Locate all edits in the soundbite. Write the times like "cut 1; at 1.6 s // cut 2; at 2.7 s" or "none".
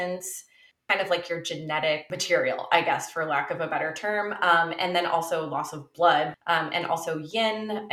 cut 1; at 0.8 s // cut 2; at 2.1 s // cut 3; at 6.4 s